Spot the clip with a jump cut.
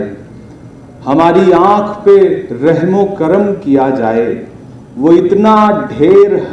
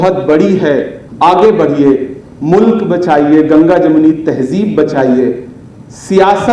second; 1 cut; at 1.0 s

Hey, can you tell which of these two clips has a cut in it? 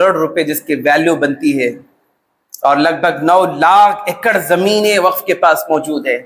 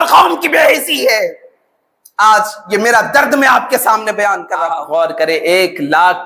second; 1 cut; at 4.5 s

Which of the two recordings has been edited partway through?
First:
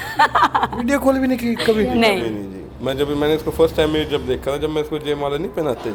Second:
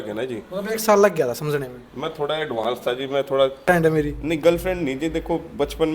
second; 1 cut; at 3.6 s

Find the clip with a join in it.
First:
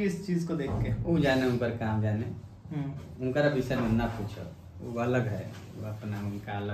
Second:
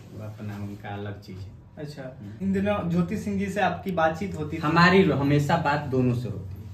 second; 1 cut; at 2.3 s

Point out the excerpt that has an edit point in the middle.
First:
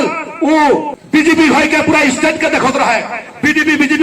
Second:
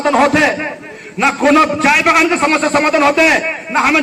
first; 1 cut; at 1.0 s

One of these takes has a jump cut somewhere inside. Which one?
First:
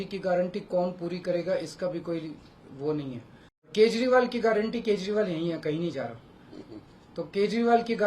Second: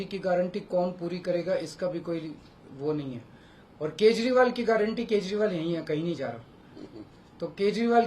first; 1 cut; at 3.7 s

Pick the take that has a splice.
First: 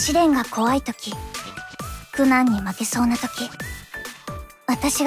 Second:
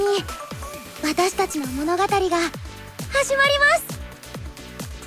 second; 1 cut; at 4.0 s

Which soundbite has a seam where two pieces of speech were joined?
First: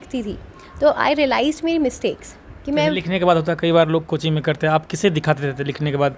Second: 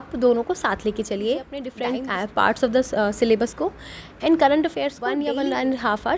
second; 2 cuts; at 1.7 s, 5.2 s

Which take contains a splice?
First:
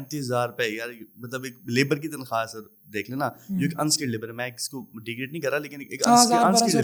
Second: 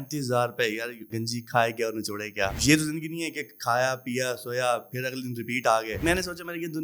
second; 3 cuts; at 1.1 s, 2.6 s, 6.0 s

